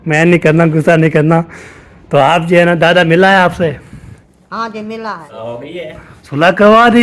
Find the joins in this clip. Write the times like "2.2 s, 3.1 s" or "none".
5.3 s